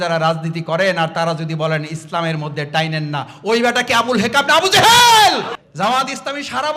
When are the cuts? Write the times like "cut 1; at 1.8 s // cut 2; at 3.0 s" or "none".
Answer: cut 1; at 5.5 s

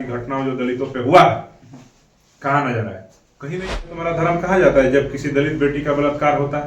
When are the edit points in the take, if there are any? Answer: cut 1; at 3.9 s

